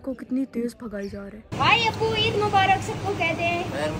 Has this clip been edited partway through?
yes; 1 cut; at 1.4 s

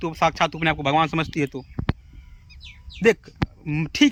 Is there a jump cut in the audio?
no; 0 cuts

